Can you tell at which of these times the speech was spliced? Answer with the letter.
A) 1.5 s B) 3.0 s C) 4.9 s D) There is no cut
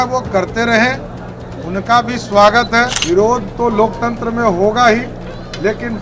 B